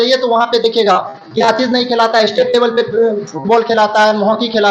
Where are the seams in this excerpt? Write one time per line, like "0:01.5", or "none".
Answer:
none